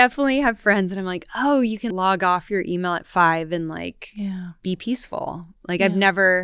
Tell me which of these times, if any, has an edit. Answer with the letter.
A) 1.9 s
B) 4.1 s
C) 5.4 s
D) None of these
A